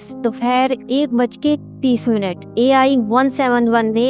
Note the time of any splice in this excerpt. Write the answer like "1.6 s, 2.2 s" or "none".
none